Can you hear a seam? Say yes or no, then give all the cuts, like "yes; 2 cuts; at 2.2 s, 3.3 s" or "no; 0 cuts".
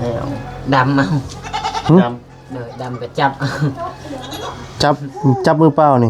no; 0 cuts